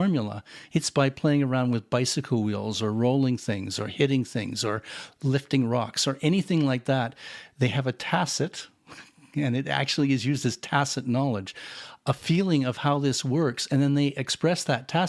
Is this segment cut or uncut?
uncut